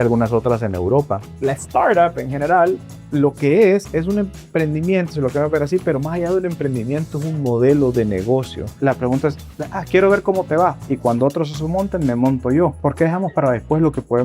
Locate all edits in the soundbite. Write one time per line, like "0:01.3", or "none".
0:01.2
0:08.8